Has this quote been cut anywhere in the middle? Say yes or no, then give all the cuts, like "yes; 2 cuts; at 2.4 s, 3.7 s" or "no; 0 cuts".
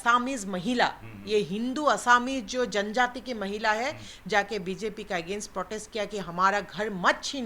no; 0 cuts